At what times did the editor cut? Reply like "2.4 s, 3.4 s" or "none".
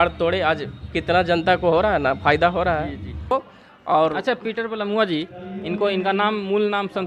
3.3 s